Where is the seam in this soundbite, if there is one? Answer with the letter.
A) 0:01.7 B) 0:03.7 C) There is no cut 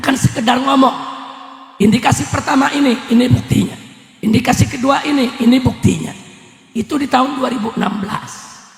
C